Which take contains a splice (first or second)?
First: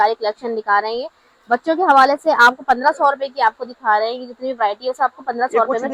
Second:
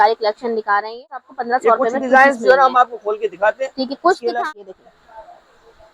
second